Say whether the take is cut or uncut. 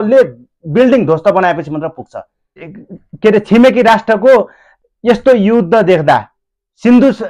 cut